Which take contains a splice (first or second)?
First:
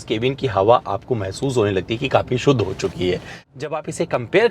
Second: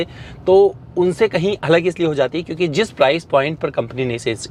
first